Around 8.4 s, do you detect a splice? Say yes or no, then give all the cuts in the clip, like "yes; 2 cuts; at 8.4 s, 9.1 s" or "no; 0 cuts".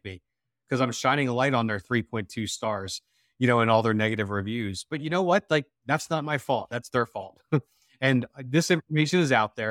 no; 0 cuts